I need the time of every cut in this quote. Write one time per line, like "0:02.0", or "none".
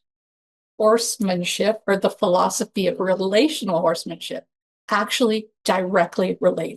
none